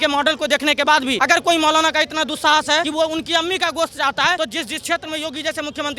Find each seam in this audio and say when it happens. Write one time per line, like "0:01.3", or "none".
0:01.2
0:02.9
0:04.4